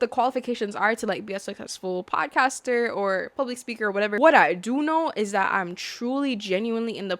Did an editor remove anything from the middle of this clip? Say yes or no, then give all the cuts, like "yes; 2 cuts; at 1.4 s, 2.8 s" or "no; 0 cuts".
yes; 1 cut; at 4.2 s